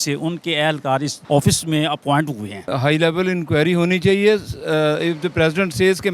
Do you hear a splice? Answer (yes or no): yes